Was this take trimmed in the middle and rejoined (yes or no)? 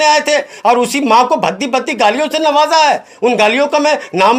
no